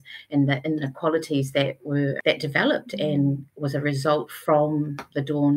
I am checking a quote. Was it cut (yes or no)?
yes